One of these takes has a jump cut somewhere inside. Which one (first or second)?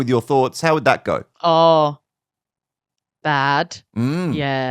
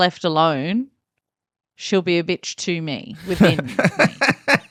first